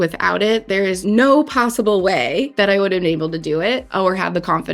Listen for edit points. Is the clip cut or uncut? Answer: cut